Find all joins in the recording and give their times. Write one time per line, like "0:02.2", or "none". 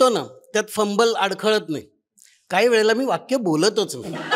none